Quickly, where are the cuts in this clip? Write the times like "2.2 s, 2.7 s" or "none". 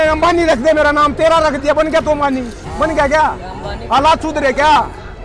none